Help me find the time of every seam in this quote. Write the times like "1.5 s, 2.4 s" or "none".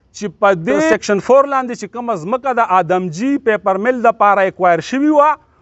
0.9 s